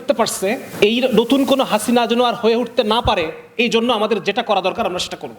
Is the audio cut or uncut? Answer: uncut